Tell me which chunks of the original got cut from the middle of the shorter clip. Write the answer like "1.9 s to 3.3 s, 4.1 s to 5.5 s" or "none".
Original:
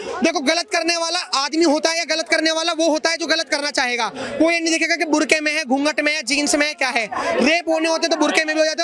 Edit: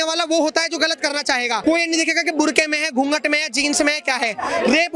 4.1 s to 4.3 s